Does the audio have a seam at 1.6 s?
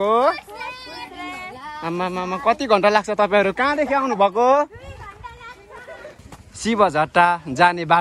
no; 1 cut; at 6.2 s

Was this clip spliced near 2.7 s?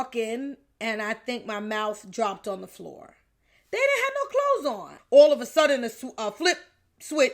no; 1 cut; at 4.9 s

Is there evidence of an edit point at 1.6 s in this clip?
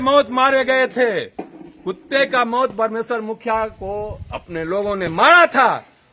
no; 0 cuts

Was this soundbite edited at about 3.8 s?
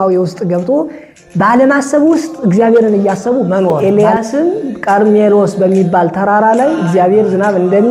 yes; 1 cut; at 3.8 s

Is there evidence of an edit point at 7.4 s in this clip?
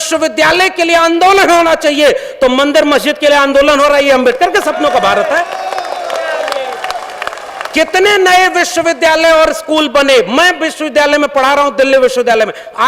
no; 0 cuts

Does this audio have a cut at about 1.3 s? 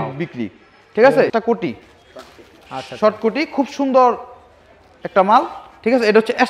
yes; 1 cut; at 1.3 s

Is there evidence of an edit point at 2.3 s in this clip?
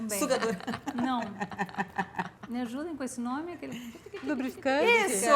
yes; 1 cut; at 2.3 s

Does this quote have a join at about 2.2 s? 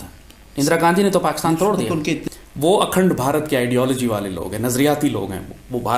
yes; 1 cut; at 2.2 s

